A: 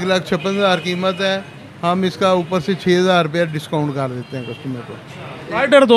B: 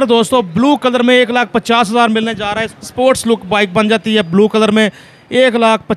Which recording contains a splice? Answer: B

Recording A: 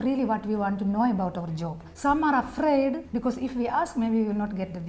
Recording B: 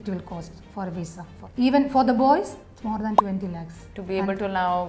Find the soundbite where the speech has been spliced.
B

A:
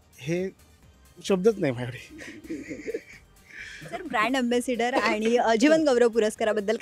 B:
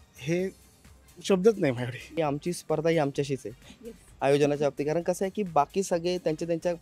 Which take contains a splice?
B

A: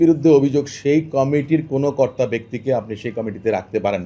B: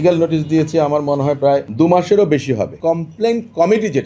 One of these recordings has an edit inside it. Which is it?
B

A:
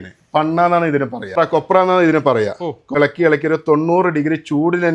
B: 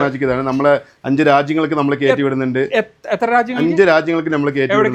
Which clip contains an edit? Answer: A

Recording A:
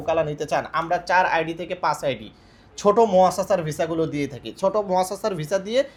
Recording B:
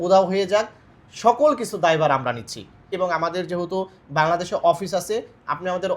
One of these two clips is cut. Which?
B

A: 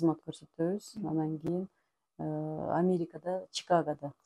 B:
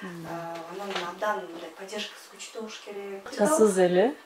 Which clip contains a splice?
B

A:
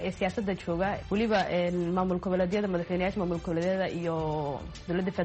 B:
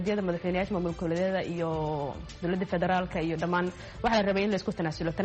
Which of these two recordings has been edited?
A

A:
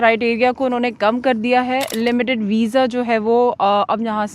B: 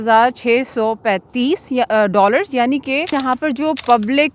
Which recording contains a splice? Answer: B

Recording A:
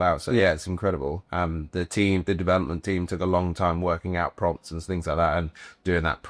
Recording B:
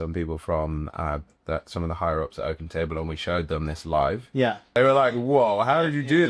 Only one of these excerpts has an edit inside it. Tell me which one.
B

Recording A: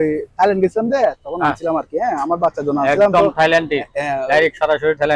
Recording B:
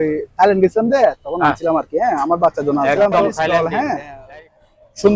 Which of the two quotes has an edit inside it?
B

